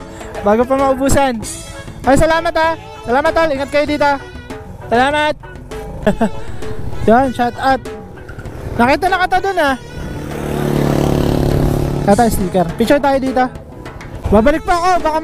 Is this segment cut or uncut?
cut